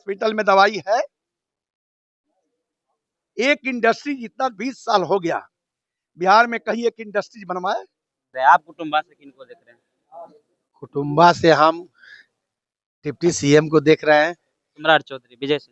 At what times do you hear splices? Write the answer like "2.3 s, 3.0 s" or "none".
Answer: 8.2 s

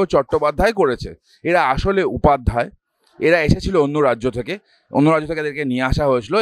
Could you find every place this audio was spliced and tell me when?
none

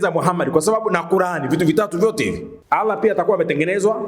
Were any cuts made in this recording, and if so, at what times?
2.5 s

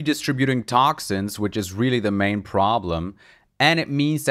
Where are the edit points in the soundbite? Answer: none

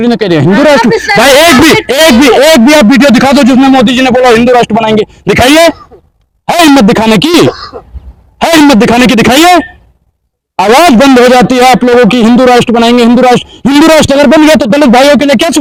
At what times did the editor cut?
none

